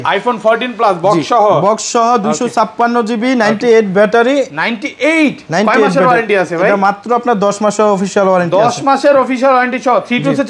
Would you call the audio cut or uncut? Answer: uncut